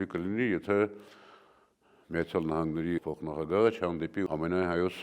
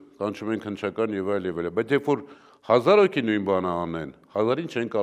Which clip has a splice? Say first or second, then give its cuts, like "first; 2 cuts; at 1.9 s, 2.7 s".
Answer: first; 2 cuts; at 3.0 s, 4.3 s